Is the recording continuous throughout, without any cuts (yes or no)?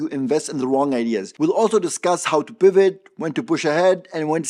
yes